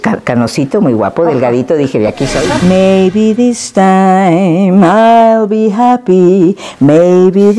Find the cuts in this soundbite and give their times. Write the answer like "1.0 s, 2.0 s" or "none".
2.5 s